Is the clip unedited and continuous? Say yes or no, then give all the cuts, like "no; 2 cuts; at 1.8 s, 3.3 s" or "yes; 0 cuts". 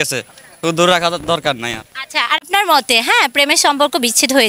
no; 1 cut; at 2.4 s